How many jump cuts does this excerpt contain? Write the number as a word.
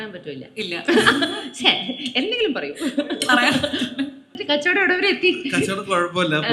one